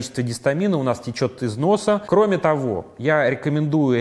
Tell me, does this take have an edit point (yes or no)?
yes